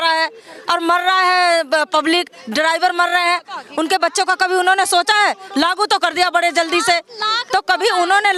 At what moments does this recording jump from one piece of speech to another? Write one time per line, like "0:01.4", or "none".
none